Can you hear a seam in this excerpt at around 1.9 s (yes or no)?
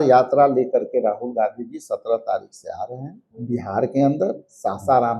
no